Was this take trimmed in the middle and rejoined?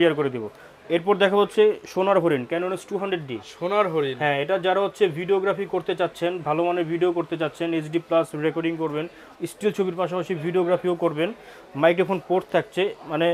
no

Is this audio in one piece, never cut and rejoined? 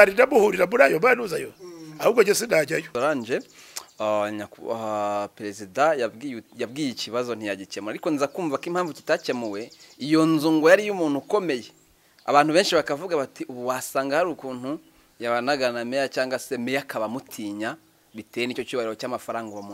no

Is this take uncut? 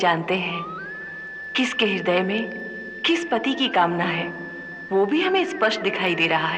yes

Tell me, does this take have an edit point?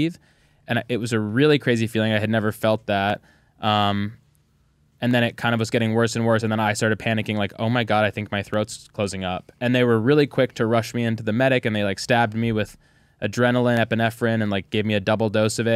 no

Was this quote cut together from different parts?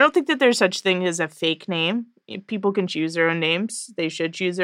no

